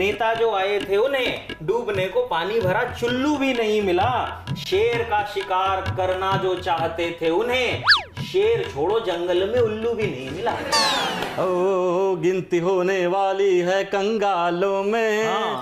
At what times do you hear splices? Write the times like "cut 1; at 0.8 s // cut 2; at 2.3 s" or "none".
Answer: cut 1; at 11.2 s